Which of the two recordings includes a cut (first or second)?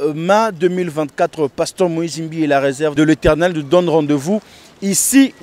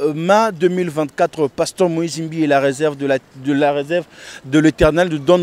first